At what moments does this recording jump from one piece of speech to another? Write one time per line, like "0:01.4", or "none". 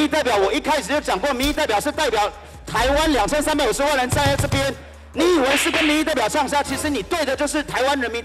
none